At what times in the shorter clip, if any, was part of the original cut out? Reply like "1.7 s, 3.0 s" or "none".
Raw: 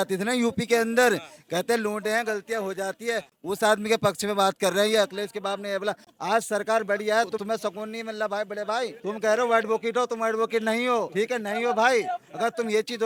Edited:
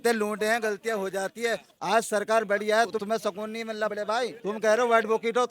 1.7 s, 3.9 s